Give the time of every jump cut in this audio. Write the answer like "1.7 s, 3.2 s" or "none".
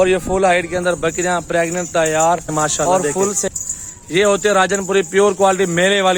3.5 s